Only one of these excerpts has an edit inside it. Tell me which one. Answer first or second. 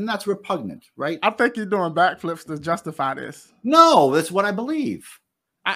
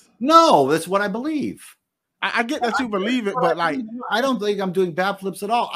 first